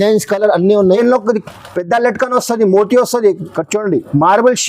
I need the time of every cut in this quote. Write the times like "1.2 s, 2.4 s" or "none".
1.0 s